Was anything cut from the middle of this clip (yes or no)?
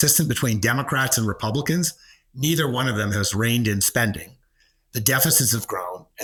no